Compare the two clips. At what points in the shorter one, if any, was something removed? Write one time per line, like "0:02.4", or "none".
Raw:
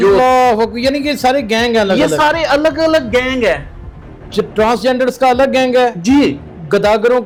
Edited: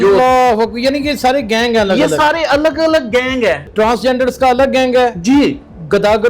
0:03.7